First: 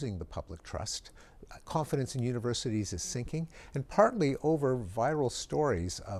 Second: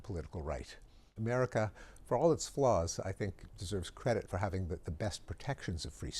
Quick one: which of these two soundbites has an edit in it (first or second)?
second